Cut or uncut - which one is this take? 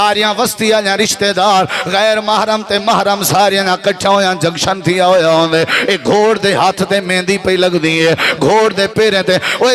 uncut